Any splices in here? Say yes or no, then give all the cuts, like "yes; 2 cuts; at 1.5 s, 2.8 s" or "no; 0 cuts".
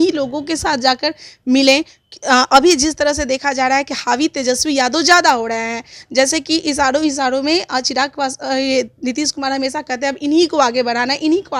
no; 0 cuts